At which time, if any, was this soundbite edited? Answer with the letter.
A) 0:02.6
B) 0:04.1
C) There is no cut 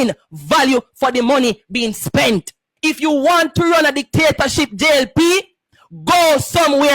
A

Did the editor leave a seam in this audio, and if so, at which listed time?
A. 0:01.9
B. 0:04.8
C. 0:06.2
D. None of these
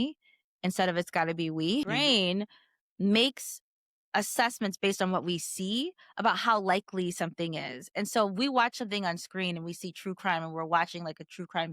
A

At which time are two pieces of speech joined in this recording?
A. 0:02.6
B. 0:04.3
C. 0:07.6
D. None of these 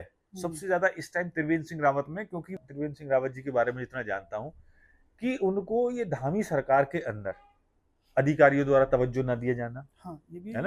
A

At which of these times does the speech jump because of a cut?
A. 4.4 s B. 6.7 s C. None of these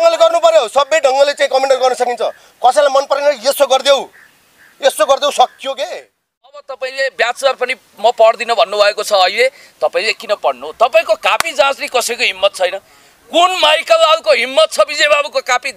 B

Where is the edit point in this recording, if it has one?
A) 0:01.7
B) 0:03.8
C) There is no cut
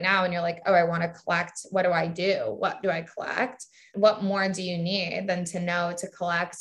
B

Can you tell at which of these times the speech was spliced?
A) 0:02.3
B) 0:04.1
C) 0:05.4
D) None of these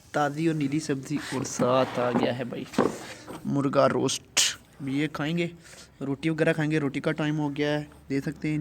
D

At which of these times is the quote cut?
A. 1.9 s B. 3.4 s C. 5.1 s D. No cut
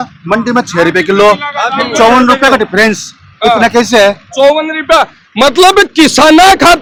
D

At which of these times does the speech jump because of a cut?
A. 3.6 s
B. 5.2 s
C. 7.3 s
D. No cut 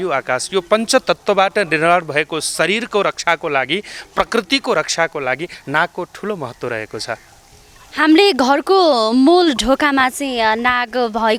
D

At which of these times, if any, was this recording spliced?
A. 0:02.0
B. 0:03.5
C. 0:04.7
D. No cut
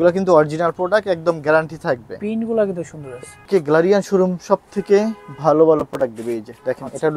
B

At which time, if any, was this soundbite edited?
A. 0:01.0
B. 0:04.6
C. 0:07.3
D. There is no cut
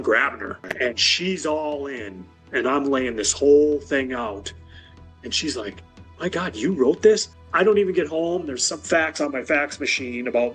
C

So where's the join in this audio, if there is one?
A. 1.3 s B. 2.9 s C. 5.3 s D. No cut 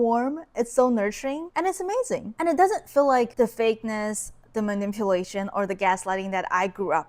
D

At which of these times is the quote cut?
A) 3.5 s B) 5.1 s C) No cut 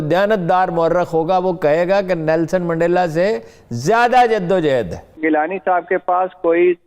B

